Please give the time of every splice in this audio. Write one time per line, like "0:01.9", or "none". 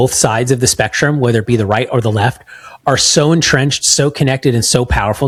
none